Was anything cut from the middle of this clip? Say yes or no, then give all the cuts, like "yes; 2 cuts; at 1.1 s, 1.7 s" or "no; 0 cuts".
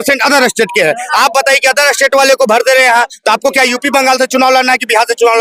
no; 0 cuts